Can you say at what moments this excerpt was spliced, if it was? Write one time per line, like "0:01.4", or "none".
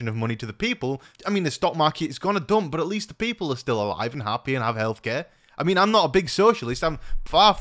0:01.1